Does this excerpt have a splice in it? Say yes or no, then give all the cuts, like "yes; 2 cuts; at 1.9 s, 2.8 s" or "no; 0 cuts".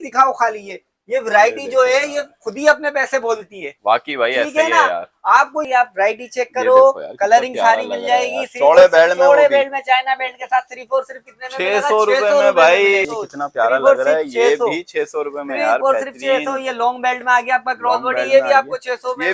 yes; 2 cuts; at 5.7 s, 13.0 s